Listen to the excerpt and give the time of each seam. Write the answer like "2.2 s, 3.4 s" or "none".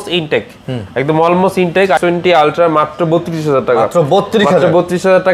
2.0 s